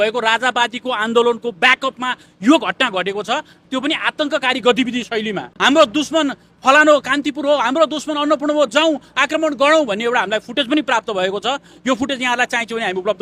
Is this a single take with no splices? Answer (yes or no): no